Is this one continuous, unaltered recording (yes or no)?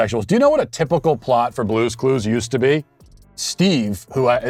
yes